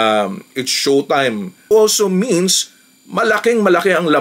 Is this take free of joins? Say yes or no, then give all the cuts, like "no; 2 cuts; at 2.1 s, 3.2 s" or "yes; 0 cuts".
no; 1 cut; at 1.6 s